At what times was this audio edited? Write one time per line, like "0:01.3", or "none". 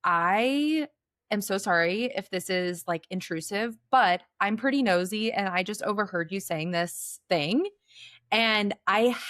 none